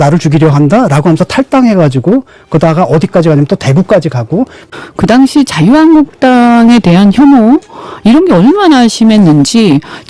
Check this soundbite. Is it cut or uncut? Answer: cut